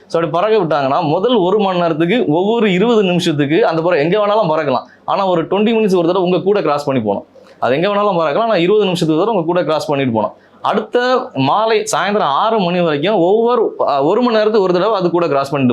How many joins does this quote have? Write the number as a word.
zero